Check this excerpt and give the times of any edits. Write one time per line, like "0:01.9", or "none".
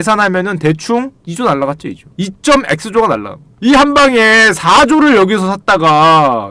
none